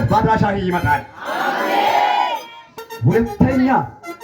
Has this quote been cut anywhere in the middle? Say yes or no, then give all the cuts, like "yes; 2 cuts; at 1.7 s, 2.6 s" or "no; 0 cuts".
yes; 1 cut; at 2.6 s